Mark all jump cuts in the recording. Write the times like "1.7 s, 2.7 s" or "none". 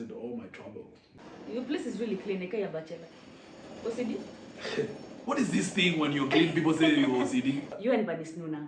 1.1 s, 7.7 s